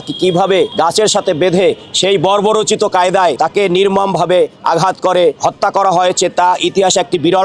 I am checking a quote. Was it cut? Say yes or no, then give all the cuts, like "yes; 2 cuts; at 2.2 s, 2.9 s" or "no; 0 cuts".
no; 0 cuts